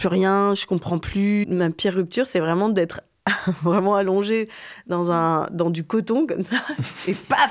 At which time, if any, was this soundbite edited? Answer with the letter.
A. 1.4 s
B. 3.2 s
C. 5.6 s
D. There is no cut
A